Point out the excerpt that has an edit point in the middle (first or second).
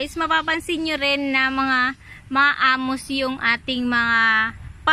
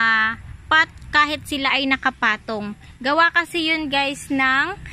second